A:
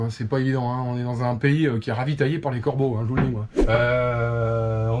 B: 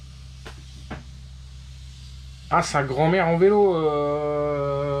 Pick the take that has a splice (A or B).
A